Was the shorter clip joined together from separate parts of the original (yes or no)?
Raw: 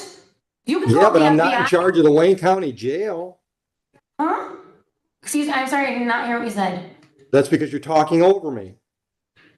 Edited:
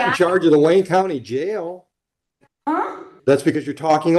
yes